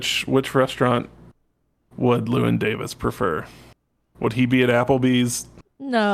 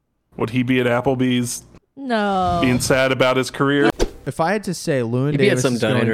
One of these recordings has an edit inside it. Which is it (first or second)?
second